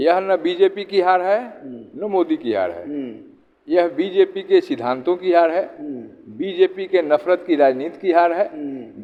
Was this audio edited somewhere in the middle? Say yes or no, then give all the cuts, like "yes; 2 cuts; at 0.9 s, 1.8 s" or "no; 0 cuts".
no; 0 cuts